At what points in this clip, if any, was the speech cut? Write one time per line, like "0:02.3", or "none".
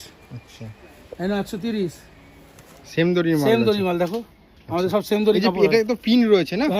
0:02.8